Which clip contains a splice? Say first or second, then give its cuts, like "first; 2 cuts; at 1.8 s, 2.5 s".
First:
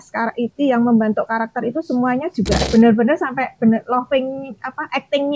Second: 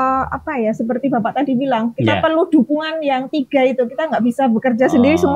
first; 1 cut; at 2.6 s